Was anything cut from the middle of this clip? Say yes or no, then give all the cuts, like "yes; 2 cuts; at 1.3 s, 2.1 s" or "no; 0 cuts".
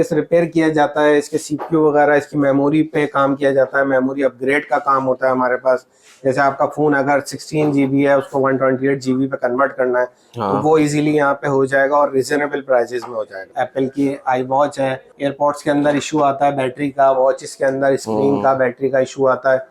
yes; 2 cuts; at 13.5 s, 15.1 s